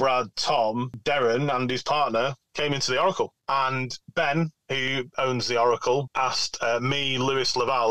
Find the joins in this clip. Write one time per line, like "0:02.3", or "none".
0:01.0
0:03.6
0:05.1
0:06.1